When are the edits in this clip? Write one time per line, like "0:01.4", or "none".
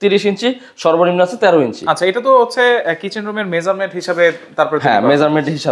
none

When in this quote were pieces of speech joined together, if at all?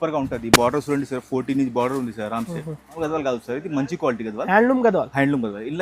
0:03.0

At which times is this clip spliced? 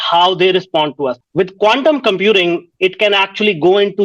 0:01.2

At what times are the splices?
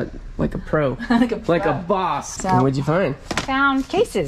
0:02.3

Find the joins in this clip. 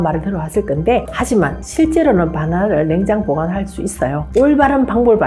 0:04.3

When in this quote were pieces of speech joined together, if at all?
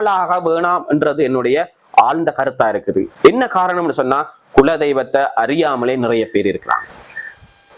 none

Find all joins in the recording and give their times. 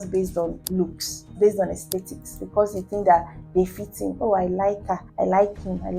0:05.1

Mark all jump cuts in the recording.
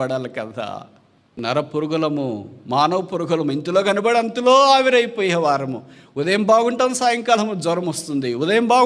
0:01.4

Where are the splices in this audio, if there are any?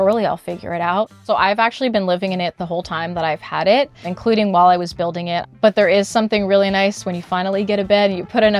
0:01.2
0:04.0
0:05.5

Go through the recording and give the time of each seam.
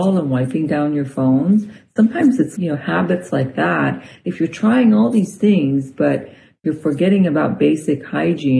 0:02.5

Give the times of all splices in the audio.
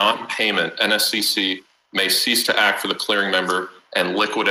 none

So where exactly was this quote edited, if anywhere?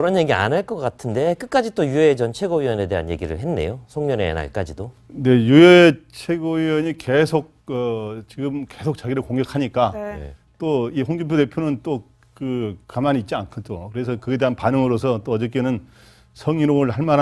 none

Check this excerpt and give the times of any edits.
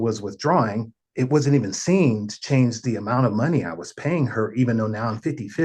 0:01.0

